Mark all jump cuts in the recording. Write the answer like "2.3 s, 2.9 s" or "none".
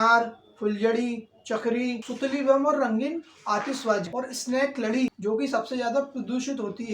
4.1 s, 5.2 s